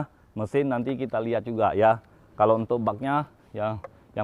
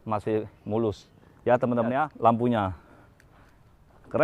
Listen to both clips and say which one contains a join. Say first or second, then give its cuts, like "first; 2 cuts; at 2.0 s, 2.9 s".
second; 1 cut; at 2.1 s